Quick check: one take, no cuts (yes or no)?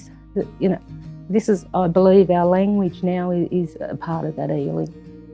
yes